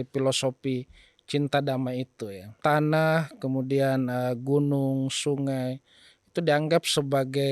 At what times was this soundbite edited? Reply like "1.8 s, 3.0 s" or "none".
2.4 s